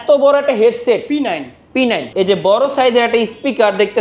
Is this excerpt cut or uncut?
cut